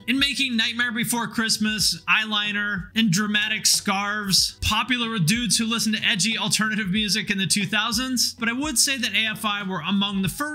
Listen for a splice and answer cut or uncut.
cut